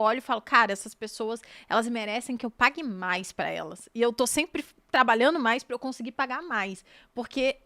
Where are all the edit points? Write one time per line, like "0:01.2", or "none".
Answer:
none

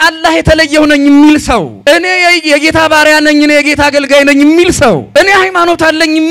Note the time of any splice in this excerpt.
0:01.7
0:05.1

